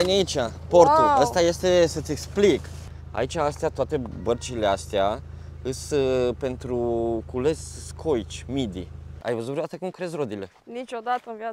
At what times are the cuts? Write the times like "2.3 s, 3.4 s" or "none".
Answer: 2.8 s, 9.1 s